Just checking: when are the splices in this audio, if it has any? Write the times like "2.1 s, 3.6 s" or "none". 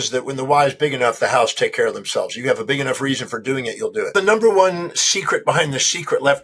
4.1 s